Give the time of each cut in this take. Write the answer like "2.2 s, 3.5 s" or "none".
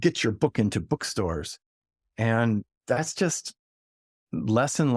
none